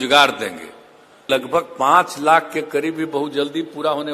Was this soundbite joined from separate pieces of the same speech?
yes; 1 cut; at 1.2 s

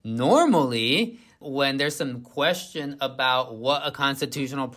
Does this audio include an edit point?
no; 0 cuts

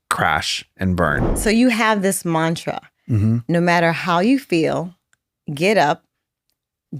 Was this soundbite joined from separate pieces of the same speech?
yes; 1 cut; at 1.3 s

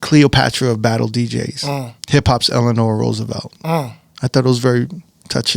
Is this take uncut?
no; 1 cut; at 1.9 s

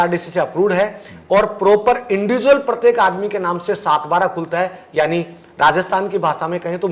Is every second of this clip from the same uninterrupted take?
yes; 0 cuts

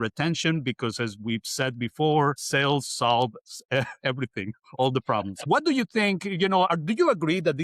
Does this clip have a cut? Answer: yes; 2 cuts; at 2.4 s, 5.4 s

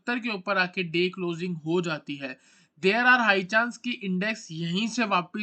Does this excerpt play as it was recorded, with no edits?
yes; 0 cuts

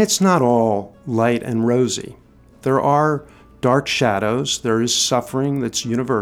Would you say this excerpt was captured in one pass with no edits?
yes; 0 cuts

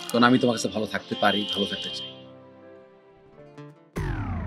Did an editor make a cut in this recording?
no; 0 cuts

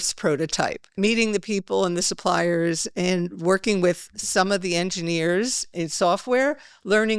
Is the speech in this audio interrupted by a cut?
yes; 2 cuts; at 0.9 s, 5.7 s

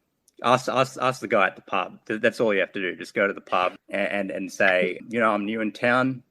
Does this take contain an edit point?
yes; 2 cuts; at 3.8 s, 5.0 s

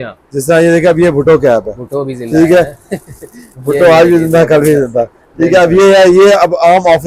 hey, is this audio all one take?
yes; 0 cuts

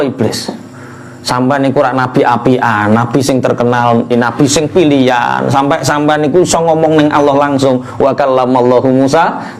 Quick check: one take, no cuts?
no; 1 cut; at 4.1 s

